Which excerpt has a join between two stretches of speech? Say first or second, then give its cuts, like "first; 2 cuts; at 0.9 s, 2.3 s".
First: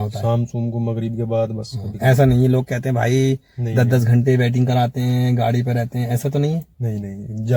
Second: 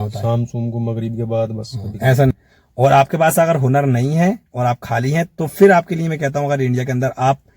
second; 1 cut; at 2.3 s